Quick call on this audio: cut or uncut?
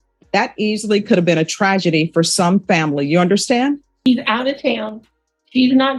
cut